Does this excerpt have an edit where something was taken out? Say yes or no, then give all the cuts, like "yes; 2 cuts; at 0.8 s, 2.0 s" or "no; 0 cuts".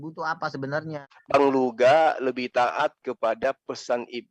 yes; 1 cut; at 0.9 s